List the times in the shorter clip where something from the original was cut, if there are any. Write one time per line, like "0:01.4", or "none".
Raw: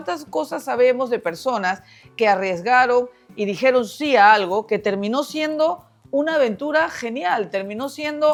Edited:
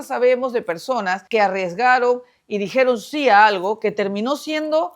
0:01.2